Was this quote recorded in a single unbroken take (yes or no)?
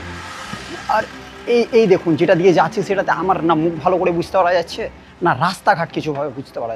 yes